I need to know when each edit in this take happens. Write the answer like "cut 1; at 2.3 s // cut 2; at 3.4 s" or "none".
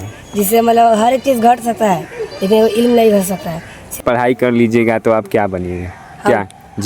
cut 1; at 4.0 s